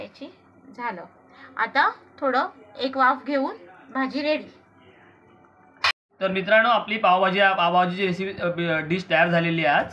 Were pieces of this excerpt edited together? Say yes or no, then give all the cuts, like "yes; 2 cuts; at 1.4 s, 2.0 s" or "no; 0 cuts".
yes; 1 cut; at 5.9 s